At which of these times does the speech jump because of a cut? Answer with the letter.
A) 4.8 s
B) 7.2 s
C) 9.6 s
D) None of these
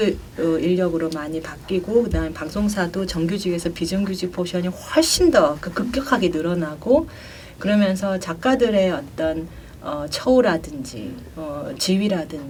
D